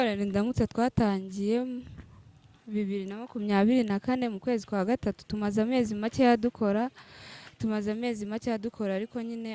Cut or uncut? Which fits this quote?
uncut